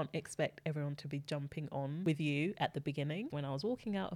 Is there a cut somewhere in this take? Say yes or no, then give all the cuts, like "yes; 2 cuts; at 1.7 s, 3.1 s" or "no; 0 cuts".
yes; 2 cuts; at 2.0 s, 3.3 s